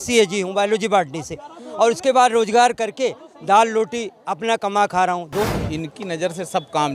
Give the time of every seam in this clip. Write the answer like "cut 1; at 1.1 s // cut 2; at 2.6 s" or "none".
cut 1; at 5.5 s